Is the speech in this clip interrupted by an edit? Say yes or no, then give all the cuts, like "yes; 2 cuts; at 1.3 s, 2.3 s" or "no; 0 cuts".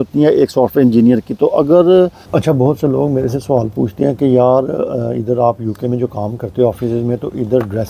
yes; 1 cut; at 2.2 s